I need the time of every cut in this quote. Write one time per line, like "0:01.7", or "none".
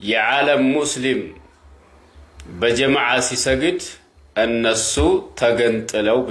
none